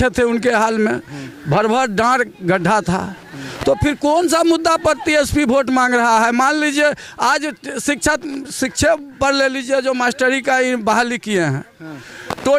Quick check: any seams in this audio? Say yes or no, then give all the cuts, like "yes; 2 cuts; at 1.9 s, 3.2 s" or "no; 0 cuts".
no; 0 cuts